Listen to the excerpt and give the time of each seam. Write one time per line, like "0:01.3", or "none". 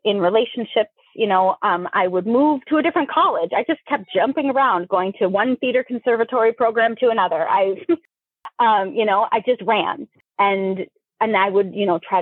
0:10.2